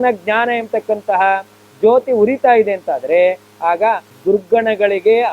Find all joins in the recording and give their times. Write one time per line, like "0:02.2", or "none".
0:04.1